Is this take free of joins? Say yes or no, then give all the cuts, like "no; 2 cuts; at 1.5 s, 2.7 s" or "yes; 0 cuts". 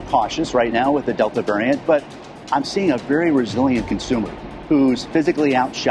yes; 0 cuts